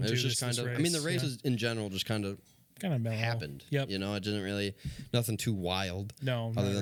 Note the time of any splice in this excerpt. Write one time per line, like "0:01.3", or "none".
none